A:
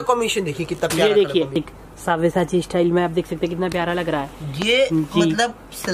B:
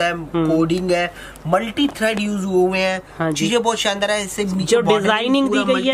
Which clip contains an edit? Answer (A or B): A